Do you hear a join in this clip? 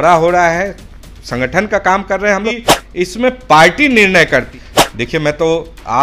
yes; 2 cuts; at 2.6 s, 4.5 s

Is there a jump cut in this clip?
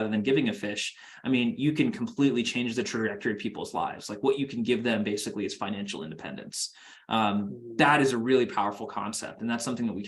no; 0 cuts

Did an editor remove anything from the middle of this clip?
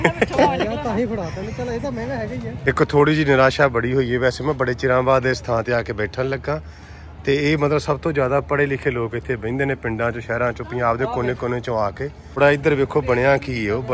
yes; 2 cuts; at 2.6 s, 12.4 s

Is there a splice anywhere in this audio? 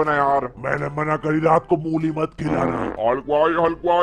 yes; 1 cut; at 2.9 s

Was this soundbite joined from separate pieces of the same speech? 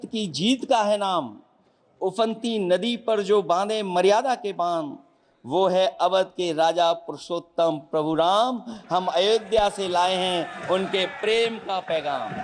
no; 0 cuts

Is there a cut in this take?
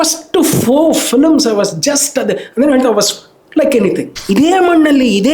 yes; 1 cut; at 4.1 s

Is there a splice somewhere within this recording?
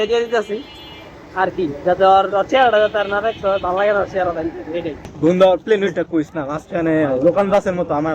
yes; 1 cut; at 5.0 s

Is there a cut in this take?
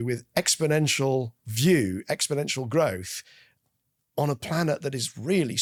no; 0 cuts

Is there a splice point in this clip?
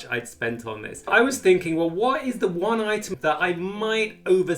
yes; 2 cuts; at 1.1 s, 3.1 s

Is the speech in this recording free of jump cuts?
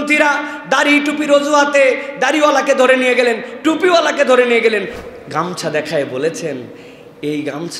no; 1 cut; at 5.0 s

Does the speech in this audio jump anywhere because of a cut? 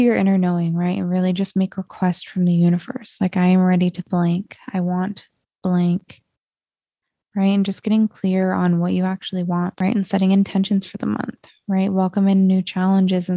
no; 0 cuts

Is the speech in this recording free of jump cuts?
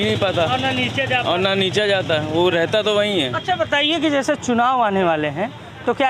yes; 0 cuts

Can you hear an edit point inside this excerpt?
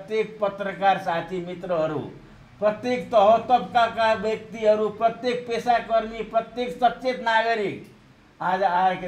no; 0 cuts

